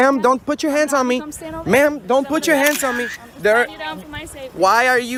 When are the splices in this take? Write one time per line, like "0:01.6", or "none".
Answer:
none